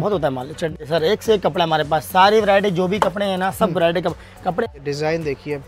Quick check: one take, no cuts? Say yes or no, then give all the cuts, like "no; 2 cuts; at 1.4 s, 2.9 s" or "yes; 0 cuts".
no; 2 cuts; at 0.8 s, 4.6 s